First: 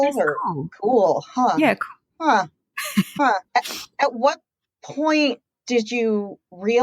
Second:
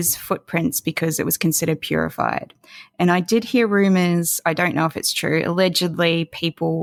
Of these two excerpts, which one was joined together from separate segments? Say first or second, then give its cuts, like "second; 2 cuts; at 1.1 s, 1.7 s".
first; 1 cut; at 3.5 s